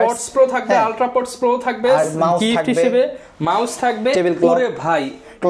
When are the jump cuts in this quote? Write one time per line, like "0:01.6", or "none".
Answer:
none